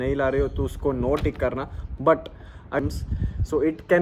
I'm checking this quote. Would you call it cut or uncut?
cut